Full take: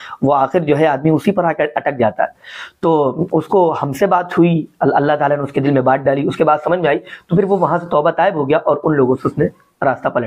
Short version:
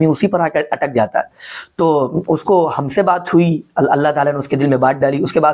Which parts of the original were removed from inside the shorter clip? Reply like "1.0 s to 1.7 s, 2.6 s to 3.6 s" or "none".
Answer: none